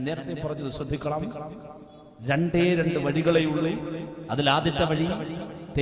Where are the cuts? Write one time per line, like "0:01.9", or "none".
none